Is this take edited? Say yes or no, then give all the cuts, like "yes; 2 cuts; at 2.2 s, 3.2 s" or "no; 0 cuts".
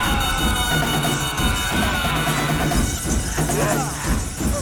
no; 0 cuts